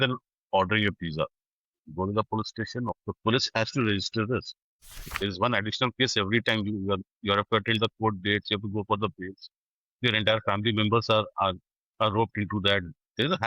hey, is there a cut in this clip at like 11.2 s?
no; 2 cuts; at 2.9 s, 5.1 s

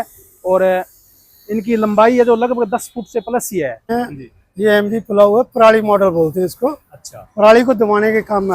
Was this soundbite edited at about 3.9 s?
yes; 1 cut; at 3.9 s

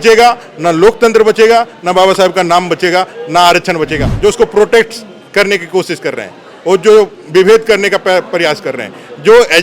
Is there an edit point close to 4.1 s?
yes; 1 cut; at 4.1 s

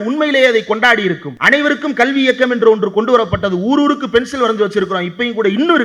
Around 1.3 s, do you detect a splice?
yes; 1 cut; at 1.3 s

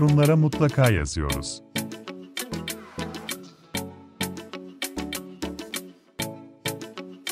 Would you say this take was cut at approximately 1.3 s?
yes; 1 cut; at 1.3 s

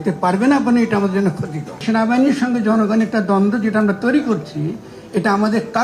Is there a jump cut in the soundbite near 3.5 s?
no; 1 cut; at 1.8 s

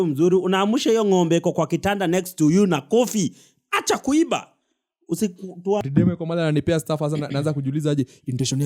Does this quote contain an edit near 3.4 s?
no; 1 cut; at 5.8 s

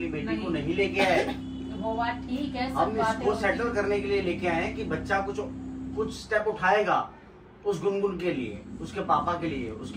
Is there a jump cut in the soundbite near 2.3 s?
no; 0 cuts

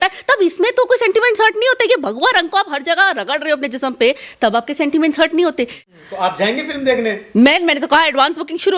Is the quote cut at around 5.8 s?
yes; 1 cut; at 5.8 s

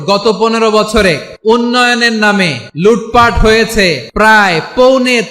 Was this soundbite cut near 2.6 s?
yes; 3 cuts; at 1.3 s, 2.6 s, 4.0 s

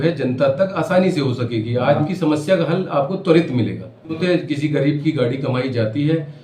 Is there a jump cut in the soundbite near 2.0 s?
yes; 2 cuts; at 2.0 s, 4.2 s

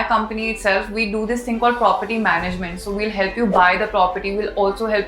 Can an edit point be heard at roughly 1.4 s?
no; 0 cuts

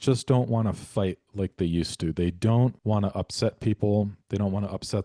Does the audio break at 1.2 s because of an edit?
yes; 2 cuts; at 1.2 s, 2.8 s

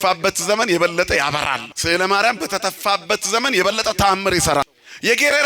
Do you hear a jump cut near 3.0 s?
no; 2 cuts; at 1.7 s, 4.6 s

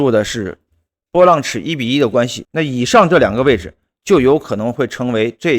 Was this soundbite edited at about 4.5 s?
no; 1 cut; at 2.4 s

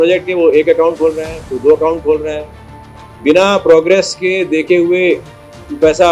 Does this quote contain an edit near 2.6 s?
no; 0 cuts

